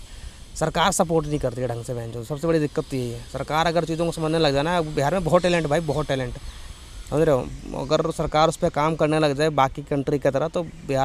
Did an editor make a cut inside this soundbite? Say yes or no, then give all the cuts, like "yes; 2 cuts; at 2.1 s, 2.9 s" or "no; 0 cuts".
no; 0 cuts